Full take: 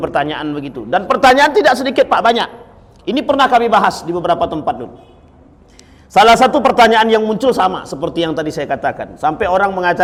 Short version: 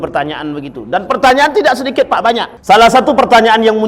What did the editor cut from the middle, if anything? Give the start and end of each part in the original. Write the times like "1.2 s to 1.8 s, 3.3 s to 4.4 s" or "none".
2.5 s to 6.0 s